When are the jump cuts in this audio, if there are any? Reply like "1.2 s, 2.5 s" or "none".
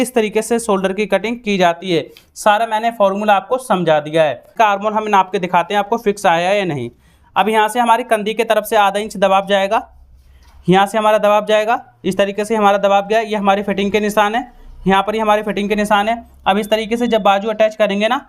4.5 s